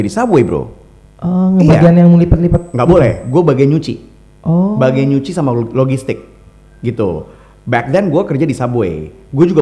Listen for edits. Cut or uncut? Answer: uncut